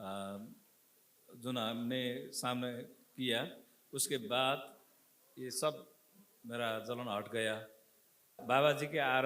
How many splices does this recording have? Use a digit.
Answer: 1